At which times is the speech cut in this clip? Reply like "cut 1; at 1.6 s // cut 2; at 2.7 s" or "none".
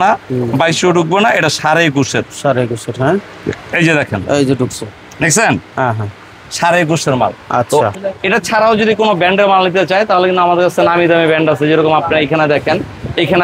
cut 1; at 7.9 s